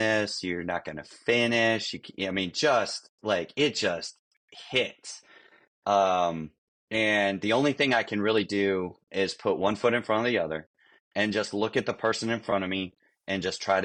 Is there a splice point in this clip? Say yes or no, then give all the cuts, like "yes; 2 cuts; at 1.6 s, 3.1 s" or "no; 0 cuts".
no; 0 cuts